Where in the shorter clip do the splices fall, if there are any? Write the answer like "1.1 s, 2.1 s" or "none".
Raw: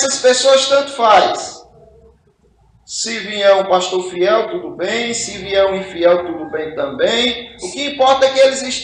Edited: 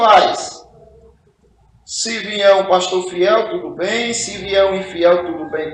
none